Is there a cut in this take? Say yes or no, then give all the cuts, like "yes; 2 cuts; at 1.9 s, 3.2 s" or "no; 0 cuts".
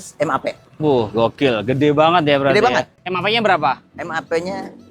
yes; 1 cut; at 3.0 s